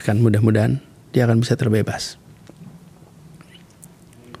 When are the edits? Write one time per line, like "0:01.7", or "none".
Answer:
none